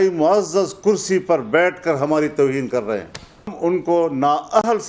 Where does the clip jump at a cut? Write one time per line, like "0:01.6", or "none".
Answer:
0:03.5